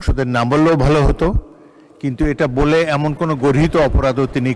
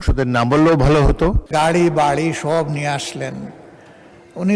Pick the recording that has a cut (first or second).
second